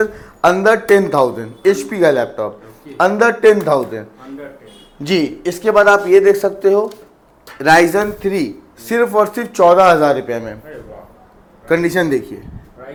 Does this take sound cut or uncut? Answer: uncut